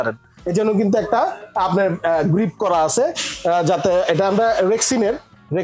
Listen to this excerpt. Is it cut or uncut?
uncut